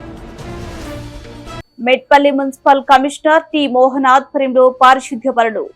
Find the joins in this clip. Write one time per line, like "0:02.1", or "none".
0:01.7